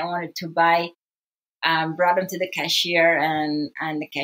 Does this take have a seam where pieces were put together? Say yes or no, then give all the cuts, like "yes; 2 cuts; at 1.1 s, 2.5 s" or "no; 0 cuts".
no; 0 cuts